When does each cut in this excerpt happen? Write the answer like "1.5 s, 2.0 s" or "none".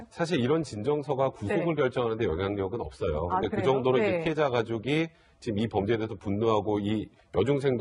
6.9 s